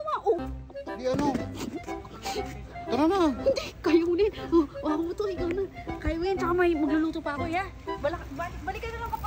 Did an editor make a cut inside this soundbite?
no; 0 cuts

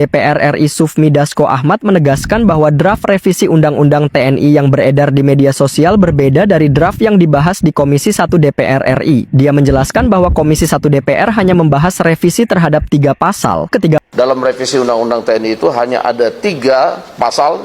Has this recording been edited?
yes; 1 cut; at 14.0 s

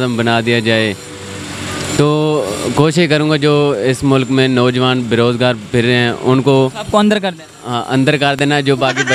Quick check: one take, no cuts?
yes; 0 cuts

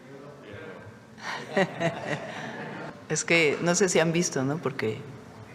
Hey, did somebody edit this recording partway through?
yes; 1 cut; at 2.9 s

